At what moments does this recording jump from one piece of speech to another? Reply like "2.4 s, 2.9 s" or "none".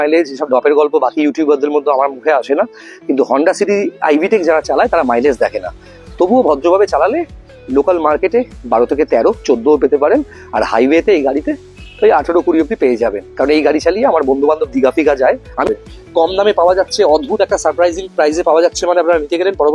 15.6 s